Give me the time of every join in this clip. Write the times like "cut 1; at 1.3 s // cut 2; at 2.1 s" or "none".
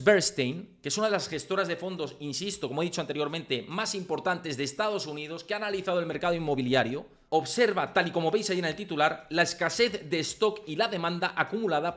cut 1; at 7.1 s